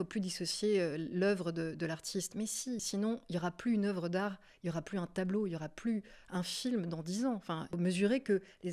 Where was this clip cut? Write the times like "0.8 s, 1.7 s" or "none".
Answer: 2.9 s, 7.8 s